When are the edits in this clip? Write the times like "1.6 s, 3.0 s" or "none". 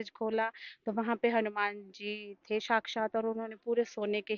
none